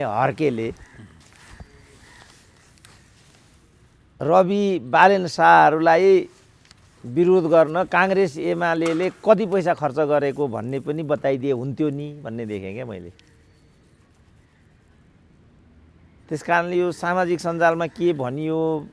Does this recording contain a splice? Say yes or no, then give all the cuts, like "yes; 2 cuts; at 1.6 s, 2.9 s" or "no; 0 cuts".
no; 0 cuts